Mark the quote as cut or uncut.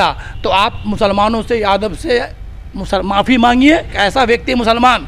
cut